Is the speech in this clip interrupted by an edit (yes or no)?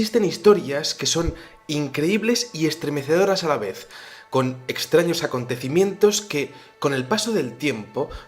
yes